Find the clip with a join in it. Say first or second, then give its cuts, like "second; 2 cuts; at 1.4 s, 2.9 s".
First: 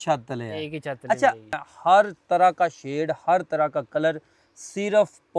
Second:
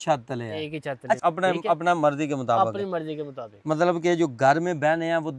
first; 1 cut; at 1.2 s